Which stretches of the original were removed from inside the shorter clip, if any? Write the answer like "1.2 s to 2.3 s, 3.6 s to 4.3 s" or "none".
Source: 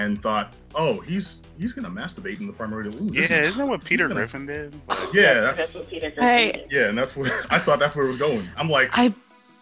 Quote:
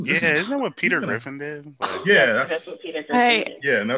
none